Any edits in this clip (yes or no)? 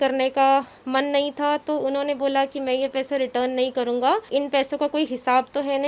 yes